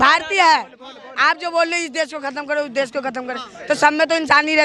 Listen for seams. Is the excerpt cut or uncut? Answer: uncut